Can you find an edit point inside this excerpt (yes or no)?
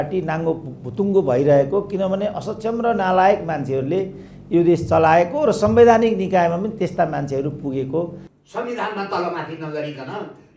yes